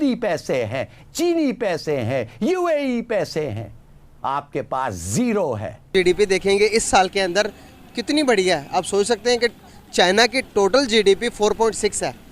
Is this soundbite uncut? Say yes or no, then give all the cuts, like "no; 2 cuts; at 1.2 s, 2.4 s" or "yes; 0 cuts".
no; 1 cut; at 5.9 s